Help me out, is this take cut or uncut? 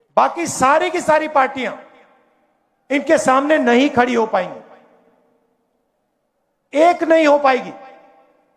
uncut